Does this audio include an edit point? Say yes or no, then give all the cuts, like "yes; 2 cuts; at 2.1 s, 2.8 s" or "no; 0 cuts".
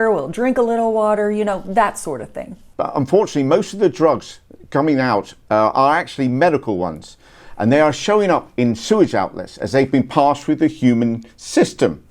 yes; 1 cut; at 2.6 s